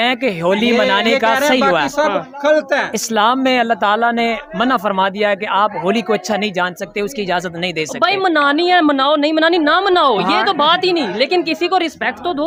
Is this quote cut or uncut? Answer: uncut